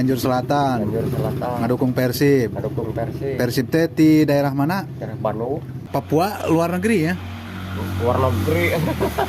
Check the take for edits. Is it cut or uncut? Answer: cut